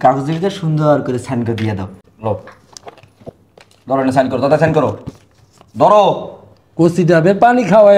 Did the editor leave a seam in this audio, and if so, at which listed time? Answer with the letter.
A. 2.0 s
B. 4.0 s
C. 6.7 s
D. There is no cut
A